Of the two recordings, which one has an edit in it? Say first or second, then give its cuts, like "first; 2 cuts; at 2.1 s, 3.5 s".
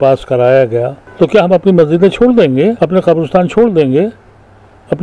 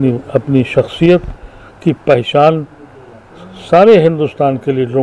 first; 2 cuts; at 1.0 s, 2.8 s